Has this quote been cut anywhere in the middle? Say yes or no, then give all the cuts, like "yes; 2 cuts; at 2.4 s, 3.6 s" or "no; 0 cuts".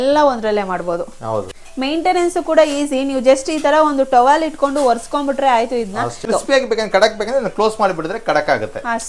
yes; 2 cuts; at 1.6 s, 6.2 s